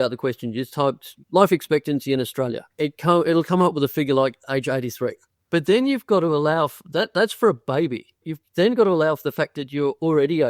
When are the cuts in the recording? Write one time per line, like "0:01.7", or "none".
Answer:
0:02.6
0:05.3
0:08.4

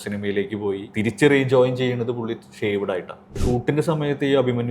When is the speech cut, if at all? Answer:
0:00.9
0:03.4

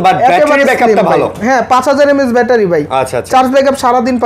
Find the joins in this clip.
none

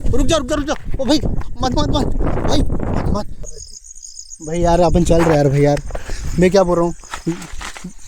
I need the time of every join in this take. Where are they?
0:03.4

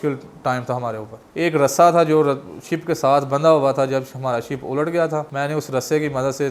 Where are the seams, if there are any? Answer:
0:01.3
0:05.3

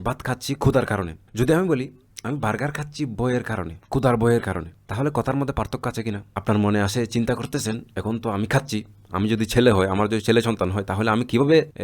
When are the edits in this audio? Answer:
0:01.2
0:03.8
0:04.8
0:06.3

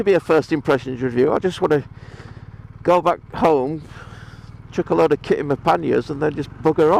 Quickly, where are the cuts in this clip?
none

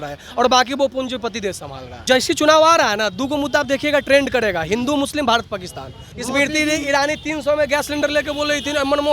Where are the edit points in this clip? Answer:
0:02.0
0:06.1

